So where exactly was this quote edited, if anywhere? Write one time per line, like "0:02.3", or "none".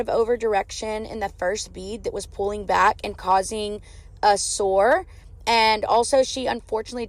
none